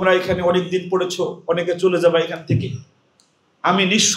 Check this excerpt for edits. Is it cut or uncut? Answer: uncut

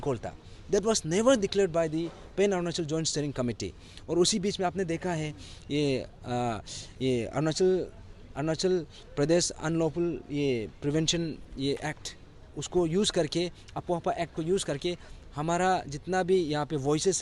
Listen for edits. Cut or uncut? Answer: uncut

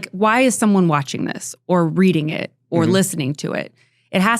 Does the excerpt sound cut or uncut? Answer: uncut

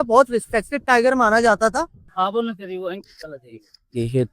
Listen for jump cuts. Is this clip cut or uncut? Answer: cut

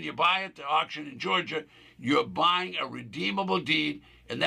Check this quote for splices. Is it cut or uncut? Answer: uncut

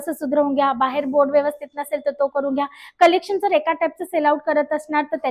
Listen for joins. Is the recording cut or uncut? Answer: uncut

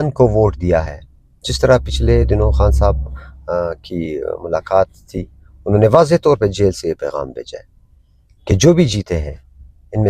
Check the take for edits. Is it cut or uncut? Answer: uncut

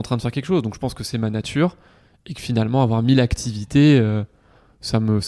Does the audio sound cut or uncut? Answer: uncut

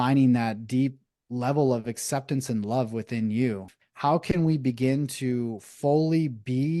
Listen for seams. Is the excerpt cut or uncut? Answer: cut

